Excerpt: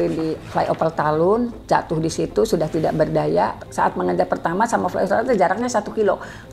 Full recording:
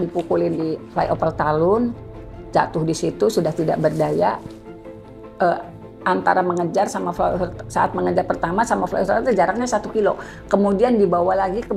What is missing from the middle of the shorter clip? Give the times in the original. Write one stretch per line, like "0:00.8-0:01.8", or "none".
0:02.0-0:02.4
0:04.5-0:07.6